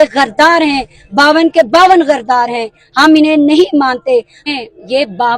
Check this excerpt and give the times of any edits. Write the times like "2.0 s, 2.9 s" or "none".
4.4 s